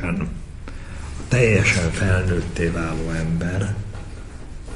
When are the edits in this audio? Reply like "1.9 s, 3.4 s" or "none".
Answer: none